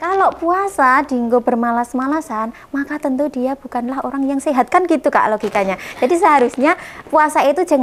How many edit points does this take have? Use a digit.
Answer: 0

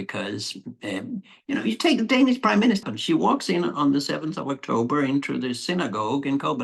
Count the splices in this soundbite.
1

